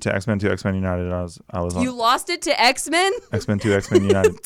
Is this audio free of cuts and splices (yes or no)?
yes